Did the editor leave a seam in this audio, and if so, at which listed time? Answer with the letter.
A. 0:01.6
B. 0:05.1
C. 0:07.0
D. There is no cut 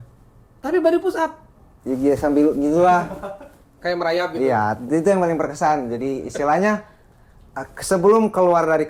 D